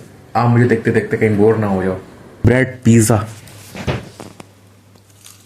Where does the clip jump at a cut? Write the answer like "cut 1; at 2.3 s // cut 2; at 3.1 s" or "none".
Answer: cut 1; at 2.4 s